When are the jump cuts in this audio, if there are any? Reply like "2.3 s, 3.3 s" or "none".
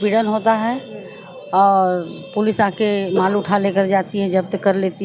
none